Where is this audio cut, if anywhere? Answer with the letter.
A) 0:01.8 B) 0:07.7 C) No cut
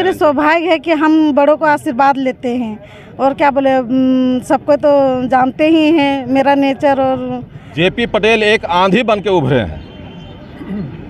B